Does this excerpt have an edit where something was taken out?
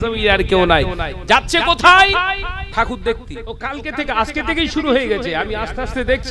yes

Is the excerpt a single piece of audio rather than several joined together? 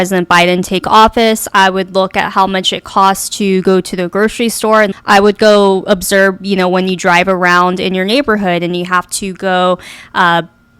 no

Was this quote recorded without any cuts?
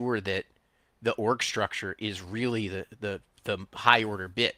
no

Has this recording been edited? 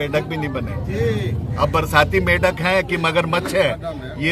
no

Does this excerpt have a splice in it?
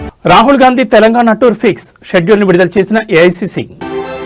no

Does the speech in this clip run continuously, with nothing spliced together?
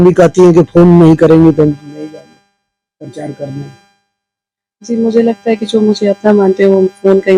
yes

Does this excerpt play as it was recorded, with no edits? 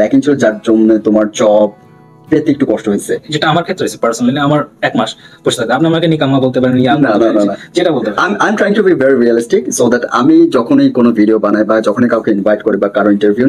no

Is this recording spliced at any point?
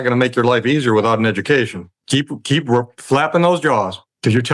yes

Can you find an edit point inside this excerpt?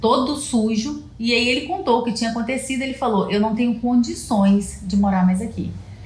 no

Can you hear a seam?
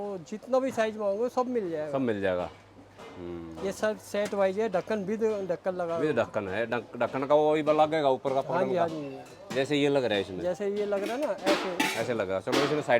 no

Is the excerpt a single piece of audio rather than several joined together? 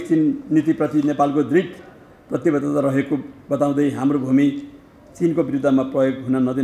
yes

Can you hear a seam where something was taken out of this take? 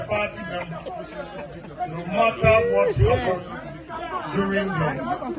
yes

